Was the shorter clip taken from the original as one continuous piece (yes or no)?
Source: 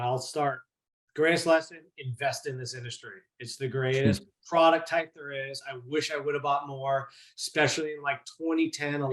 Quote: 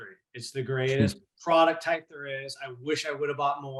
yes